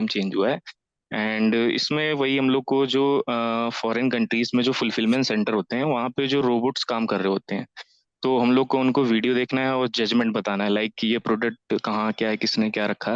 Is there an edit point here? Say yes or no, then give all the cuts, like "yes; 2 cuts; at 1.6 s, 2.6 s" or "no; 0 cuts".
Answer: no; 0 cuts